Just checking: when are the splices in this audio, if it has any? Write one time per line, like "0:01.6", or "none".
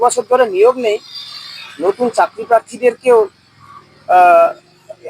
none